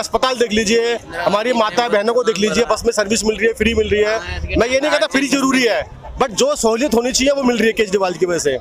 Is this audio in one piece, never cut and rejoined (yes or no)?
yes